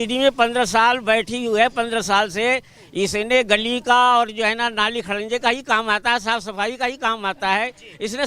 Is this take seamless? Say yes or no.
yes